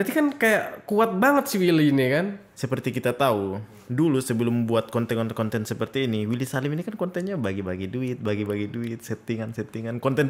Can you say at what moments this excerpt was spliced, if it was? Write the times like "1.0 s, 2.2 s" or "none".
2.5 s